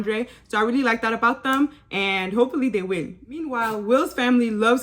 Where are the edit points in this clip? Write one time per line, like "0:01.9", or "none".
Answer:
0:03.3